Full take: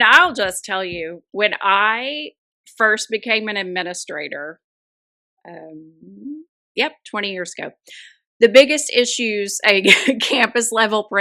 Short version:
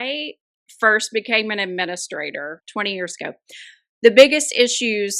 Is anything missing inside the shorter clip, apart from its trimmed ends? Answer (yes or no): yes